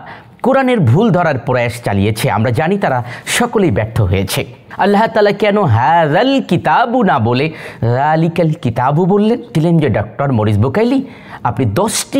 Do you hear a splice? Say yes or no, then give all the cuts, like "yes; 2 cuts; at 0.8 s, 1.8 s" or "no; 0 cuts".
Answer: yes; 2 cuts; at 4.6 s, 9.5 s